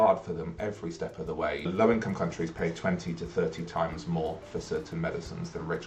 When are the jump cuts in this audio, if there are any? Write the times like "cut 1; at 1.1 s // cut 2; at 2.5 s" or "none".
cut 1; at 1.7 s